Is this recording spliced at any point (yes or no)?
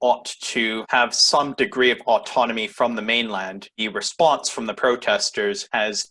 no